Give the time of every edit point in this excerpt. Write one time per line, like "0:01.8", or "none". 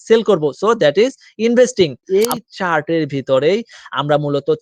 0:02.2